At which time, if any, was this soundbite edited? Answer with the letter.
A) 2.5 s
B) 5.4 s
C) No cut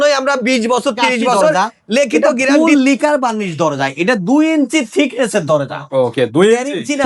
A